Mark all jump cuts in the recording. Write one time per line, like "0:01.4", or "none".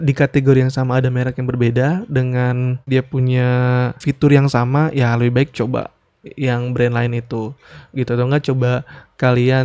0:02.9
0:04.0